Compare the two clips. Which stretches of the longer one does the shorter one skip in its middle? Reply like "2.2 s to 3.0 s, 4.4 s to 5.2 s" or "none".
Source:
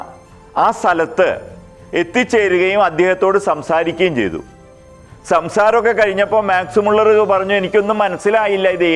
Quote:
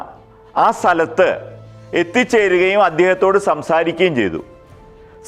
none